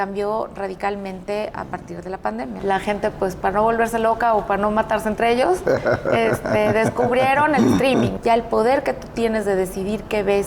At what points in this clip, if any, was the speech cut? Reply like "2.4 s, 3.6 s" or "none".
2.6 s, 8.1 s